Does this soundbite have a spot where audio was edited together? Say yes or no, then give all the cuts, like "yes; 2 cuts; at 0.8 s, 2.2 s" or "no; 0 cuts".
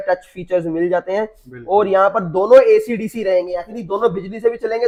no; 0 cuts